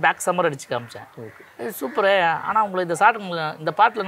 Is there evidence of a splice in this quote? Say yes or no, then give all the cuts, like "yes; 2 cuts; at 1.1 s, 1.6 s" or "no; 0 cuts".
no; 0 cuts